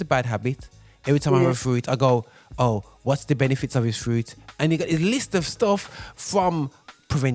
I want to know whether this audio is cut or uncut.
uncut